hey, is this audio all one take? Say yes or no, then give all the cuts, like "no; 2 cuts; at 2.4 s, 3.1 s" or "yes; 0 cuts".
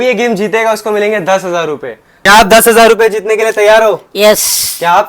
no; 1 cut; at 2.1 s